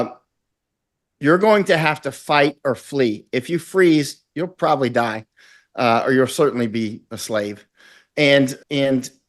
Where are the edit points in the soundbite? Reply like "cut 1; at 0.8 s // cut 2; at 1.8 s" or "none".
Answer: none